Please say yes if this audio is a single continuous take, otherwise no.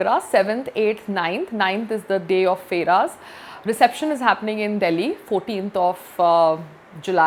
yes